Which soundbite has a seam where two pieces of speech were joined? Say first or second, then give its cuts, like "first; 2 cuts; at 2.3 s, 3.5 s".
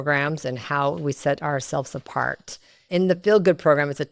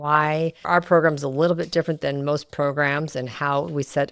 first; 1 cut; at 2.9 s